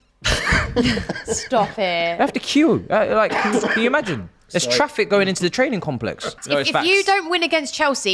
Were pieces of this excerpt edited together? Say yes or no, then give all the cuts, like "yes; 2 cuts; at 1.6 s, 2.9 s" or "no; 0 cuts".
yes; 1 cut; at 6.4 s